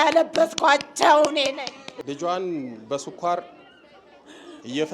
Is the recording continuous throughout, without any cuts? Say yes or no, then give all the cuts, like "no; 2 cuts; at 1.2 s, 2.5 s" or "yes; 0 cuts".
no; 1 cut; at 1.8 s